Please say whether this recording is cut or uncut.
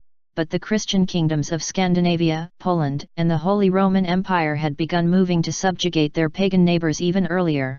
uncut